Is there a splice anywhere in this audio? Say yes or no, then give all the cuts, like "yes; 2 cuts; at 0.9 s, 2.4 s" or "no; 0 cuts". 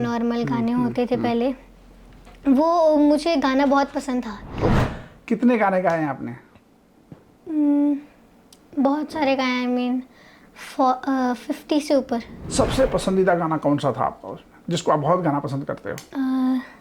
yes; 2 cuts; at 4.7 s, 12.4 s